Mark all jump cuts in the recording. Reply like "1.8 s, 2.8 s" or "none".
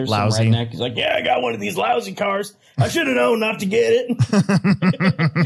none